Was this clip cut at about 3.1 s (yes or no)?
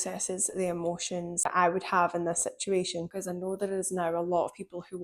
yes